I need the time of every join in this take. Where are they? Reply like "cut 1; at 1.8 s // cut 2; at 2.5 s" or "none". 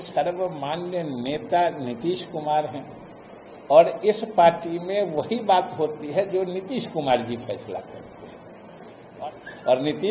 cut 1; at 9.1 s